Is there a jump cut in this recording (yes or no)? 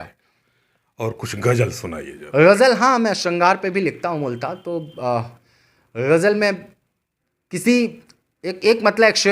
no